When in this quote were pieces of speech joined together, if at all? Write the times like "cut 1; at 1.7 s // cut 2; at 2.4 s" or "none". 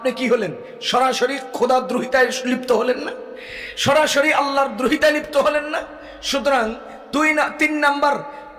none